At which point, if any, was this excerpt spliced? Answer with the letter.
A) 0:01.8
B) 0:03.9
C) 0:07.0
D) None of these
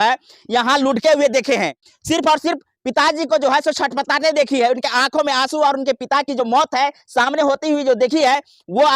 A